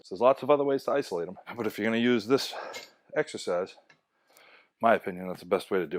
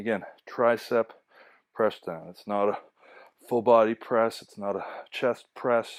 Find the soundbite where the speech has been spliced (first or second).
first